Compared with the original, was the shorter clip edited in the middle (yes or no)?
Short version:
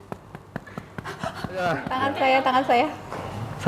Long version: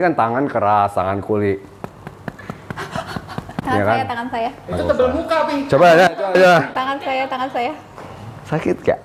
yes